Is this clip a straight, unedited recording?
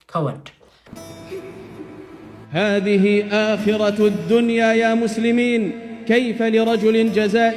no; 1 cut; at 0.9 s

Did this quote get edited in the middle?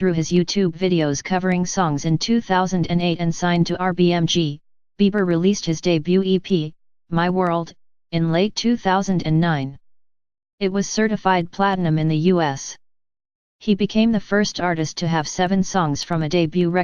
no; 0 cuts

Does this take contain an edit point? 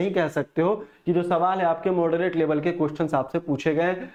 no; 0 cuts

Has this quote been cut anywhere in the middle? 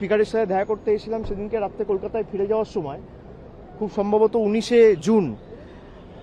no; 0 cuts

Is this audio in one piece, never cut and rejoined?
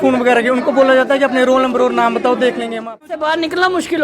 no; 1 cut; at 3.1 s

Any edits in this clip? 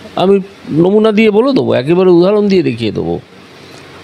no; 0 cuts

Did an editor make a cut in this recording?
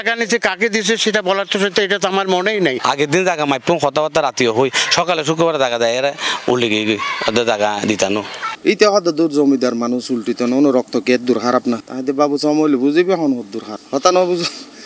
yes; 2 cuts; at 2.8 s, 8.4 s

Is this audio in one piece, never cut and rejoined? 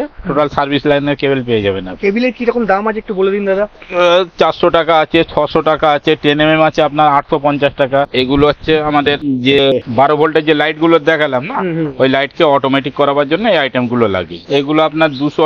no; 3 cuts; at 8.1 s, 9.2 s, 14.4 s

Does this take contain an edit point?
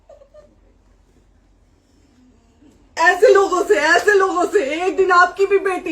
yes; 1 cut; at 3.0 s

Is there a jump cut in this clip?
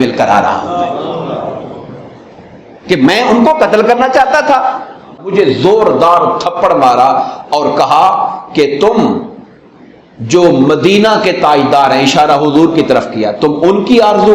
yes; 1 cut; at 5.2 s

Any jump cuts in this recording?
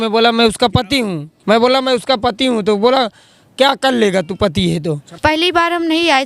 yes; 2 cuts; at 1.3 s, 5.2 s

